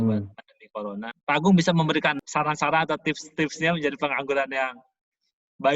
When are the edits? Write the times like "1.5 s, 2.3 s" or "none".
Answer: 1.1 s, 2.2 s